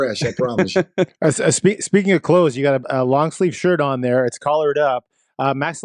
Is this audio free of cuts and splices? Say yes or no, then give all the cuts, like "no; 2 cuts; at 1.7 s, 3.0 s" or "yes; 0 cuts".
yes; 0 cuts